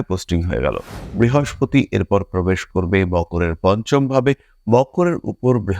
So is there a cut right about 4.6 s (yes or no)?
no